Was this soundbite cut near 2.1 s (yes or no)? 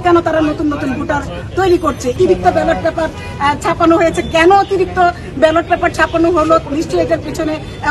yes